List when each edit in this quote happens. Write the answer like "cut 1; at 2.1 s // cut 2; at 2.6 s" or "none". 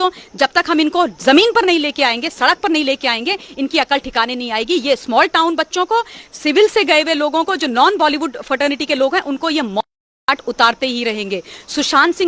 none